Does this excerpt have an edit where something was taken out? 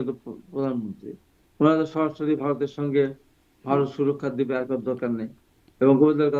no; 0 cuts

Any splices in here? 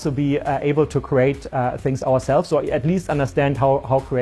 no; 0 cuts

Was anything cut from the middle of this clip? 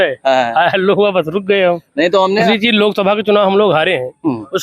yes; 1 cut; at 2.5 s

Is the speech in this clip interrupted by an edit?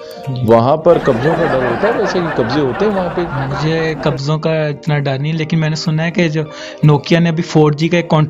yes; 1 cut; at 3.4 s

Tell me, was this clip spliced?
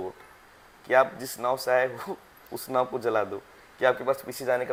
no; 0 cuts

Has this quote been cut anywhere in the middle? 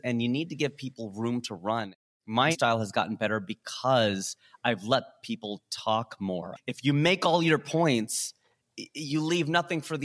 yes; 2 cuts; at 2.5 s, 6.5 s

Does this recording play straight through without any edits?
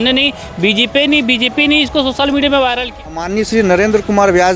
no; 1 cut; at 3.3 s

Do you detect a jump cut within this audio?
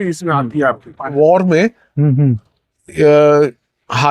yes; 1 cut; at 1.2 s

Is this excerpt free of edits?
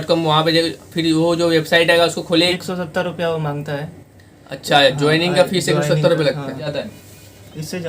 no; 2 cuts; at 2.5 s, 6.7 s

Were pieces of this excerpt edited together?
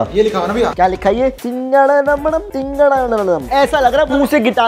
yes; 1 cut; at 1.4 s

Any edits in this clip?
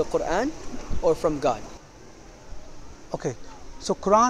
no; 0 cuts

